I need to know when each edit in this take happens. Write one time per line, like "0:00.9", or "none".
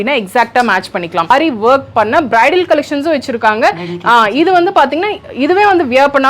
0:01.3

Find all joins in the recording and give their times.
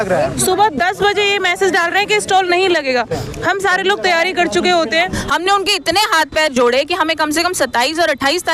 0:05.0

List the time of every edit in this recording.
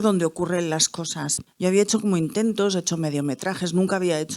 0:01.3

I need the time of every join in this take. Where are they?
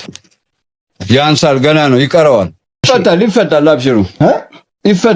0:02.8

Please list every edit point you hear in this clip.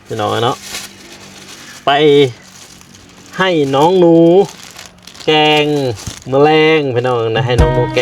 none

